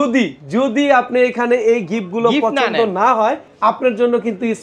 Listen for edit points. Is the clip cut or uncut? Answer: cut